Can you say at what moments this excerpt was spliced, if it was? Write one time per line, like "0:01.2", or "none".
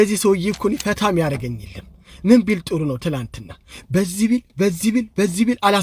none